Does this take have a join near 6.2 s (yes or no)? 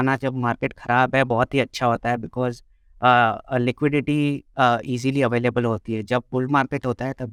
no